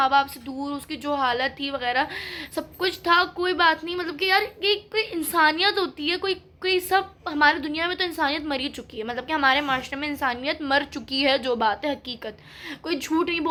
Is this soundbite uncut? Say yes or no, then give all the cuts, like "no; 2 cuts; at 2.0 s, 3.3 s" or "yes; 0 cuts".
yes; 0 cuts